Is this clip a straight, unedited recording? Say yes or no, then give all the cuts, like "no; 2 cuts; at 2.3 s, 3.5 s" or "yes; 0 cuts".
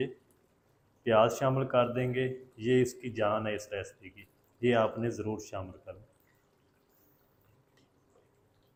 yes; 0 cuts